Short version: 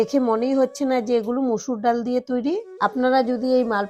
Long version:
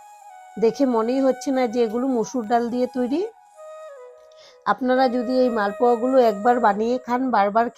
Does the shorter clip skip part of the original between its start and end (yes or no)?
yes